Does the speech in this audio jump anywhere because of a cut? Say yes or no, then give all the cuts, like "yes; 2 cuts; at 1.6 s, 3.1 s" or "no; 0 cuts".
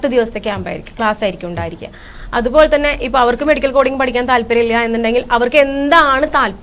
yes; 1 cut; at 2.1 s